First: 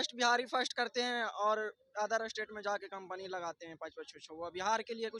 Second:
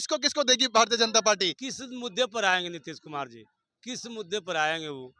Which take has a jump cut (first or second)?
second